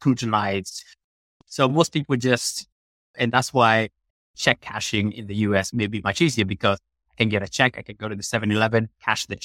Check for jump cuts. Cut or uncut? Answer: cut